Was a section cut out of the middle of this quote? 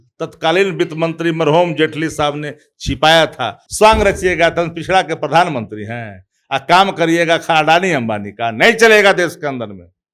yes; 1 cut; at 3.6 s

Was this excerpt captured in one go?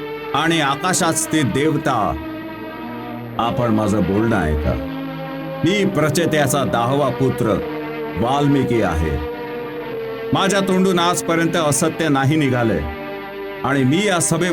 yes; 0 cuts

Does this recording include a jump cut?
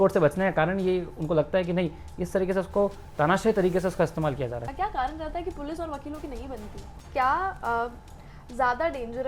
yes; 2 cuts; at 4.7 s, 7.0 s

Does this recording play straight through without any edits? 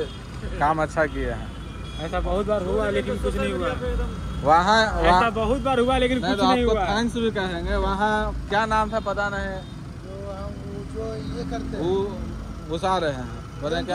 yes; 0 cuts

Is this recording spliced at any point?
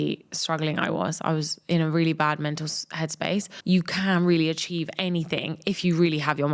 yes; 1 cut; at 3.5 s

